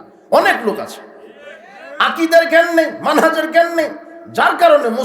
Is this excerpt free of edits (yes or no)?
yes